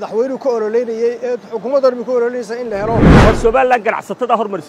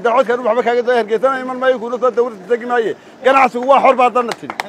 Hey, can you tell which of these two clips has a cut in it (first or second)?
first